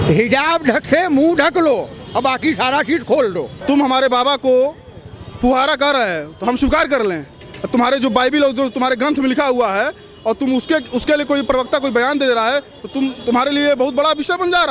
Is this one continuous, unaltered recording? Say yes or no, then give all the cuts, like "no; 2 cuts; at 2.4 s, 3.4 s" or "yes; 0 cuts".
no; 1 cut; at 3.5 s